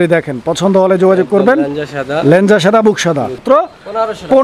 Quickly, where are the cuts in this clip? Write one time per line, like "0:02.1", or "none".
0:03.4